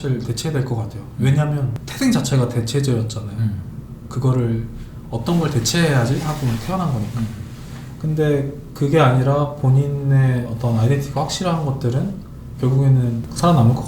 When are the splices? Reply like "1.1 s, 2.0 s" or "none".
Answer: none